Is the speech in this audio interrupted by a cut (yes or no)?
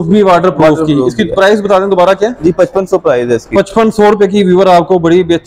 no